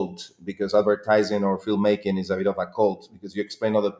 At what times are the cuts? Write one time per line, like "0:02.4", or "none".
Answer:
none